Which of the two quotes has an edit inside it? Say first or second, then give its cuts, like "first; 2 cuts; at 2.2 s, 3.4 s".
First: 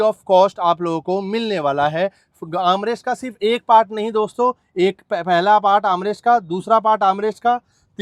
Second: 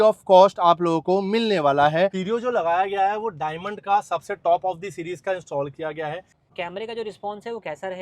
second; 2 cuts; at 2.2 s, 6.4 s